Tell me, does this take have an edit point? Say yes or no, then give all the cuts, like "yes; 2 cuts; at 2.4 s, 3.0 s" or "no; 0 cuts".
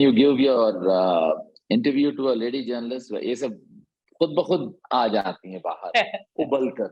no; 0 cuts